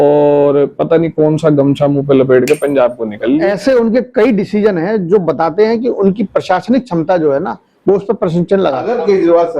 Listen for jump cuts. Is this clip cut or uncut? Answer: cut